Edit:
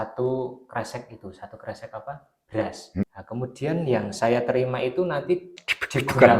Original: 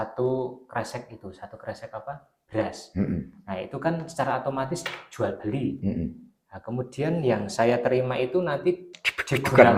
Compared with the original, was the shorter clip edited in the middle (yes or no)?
yes